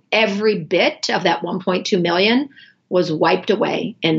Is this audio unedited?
yes; 0 cuts

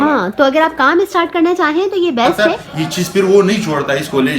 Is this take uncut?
no; 1 cut; at 2.5 s

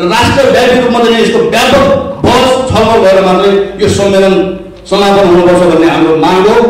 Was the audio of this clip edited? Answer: no; 0 cuts

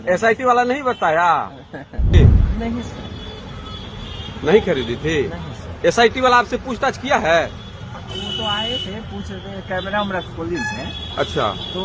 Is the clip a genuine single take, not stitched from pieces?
no; 1 cut; at 2.1 s

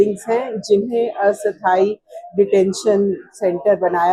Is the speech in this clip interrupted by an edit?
no; 0 cuts

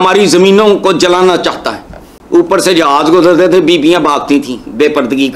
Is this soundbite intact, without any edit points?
yes; 0 cuts

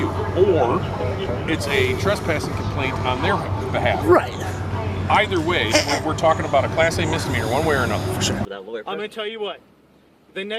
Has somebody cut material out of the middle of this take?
yes; 1 cut; at 8.4 s

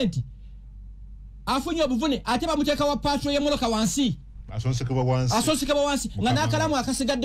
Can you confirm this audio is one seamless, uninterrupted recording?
yes; 0 cuts

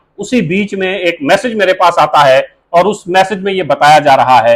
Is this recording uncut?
yes; 0 cuts

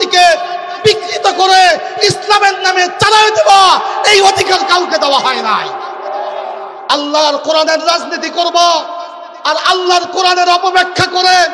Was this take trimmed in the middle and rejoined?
yes; 1 cut; at 6.8 s

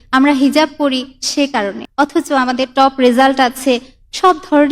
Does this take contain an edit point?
yes; 1 cut; at 1.8 s

